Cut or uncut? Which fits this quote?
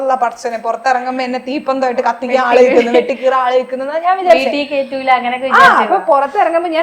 uncut